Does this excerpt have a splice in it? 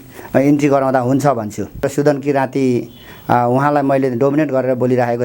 yes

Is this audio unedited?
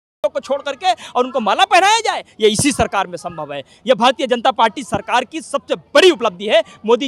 yes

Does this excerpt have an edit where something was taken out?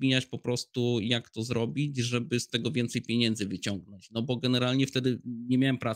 no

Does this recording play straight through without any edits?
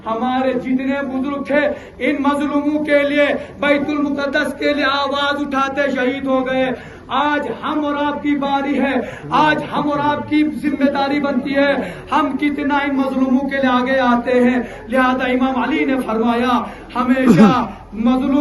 yes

